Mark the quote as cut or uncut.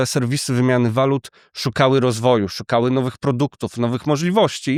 uncut